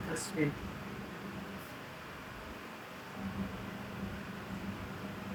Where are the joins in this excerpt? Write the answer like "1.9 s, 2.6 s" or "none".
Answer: none